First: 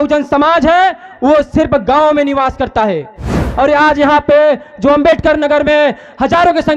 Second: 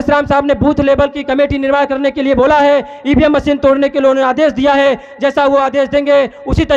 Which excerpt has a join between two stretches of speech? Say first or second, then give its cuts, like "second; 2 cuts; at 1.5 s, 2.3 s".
first; 1 cut; at 3.4 s